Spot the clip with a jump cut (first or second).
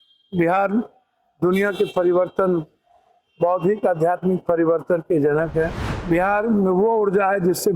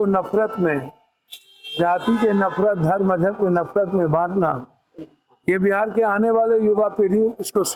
first